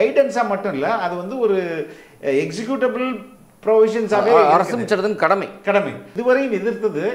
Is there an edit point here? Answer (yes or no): yes